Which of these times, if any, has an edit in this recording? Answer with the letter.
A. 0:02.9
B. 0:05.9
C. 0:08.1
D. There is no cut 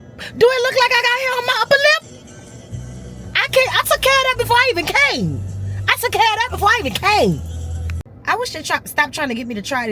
C